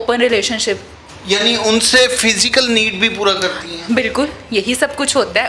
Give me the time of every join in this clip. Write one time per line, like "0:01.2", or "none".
0:01.0